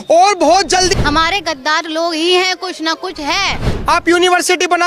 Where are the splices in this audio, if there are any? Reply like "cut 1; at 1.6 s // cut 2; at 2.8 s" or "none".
cut 1; at 1.0 s // cut 2; at 3.6 s